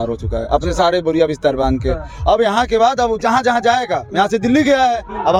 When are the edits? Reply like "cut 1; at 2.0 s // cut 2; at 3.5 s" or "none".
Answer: none